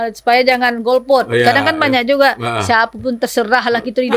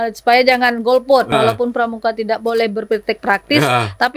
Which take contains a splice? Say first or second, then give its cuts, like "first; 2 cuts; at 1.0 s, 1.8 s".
second; 1 cut; at 1.3 s